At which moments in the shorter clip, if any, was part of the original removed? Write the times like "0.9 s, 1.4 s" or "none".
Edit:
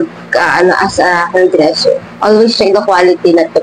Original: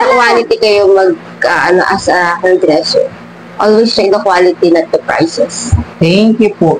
2.1 s